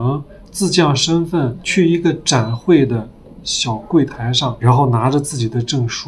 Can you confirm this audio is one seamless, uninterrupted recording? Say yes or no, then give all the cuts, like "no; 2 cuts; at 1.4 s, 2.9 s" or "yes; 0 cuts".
no; 2 cuts; at 1.6 s, 4.6 s